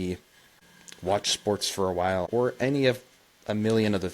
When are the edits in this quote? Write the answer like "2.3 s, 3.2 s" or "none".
2.3 s